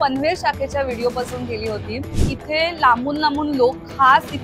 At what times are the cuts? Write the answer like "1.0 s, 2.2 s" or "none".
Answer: 2.2 s